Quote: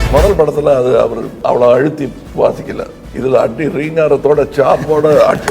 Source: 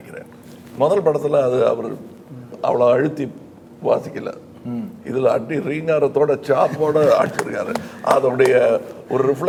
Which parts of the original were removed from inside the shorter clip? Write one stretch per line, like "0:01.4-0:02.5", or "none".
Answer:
0:01.9-0:02.5
0:03.4-0:03.7
0:04.5-0:04.9